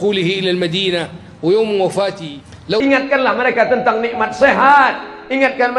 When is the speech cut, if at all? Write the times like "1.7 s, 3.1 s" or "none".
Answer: 2.8 s